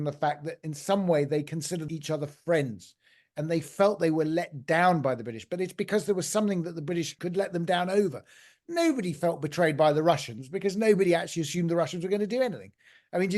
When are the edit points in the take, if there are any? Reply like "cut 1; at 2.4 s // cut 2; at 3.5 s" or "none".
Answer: cut 1; at 1.8 s // cut 2; at 7.2 s